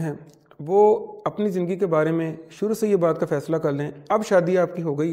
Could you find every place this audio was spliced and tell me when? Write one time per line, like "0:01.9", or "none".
none